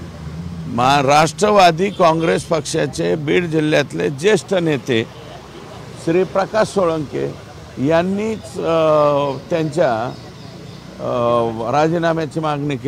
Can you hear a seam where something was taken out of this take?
no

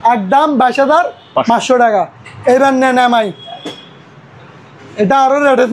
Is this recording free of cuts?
yes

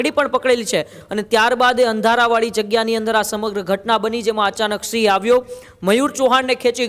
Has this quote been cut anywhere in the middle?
no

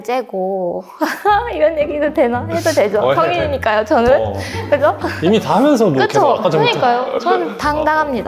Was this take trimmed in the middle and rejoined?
no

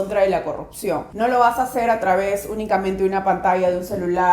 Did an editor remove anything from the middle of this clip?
yes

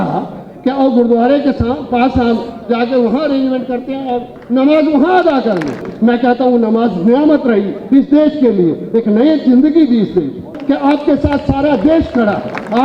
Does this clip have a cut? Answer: yes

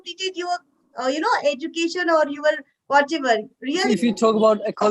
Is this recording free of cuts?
no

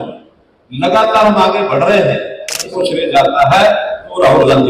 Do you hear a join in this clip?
yes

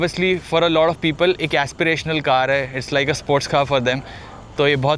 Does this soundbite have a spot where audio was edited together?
no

